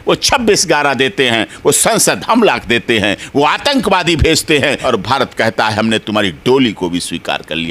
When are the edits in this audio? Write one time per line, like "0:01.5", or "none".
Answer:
0:04.8

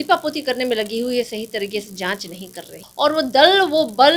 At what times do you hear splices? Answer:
0:02.8

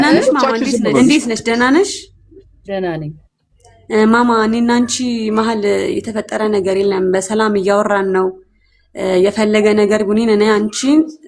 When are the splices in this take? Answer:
0:01.0

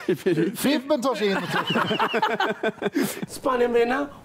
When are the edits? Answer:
0:03.2

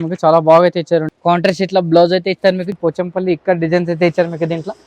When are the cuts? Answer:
0:01.1
0:02.7

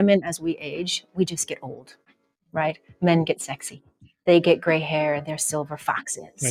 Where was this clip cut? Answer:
none

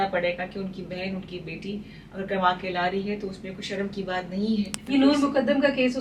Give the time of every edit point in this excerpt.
0:04.8

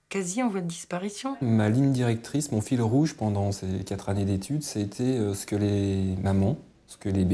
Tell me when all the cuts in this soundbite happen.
0:01.4

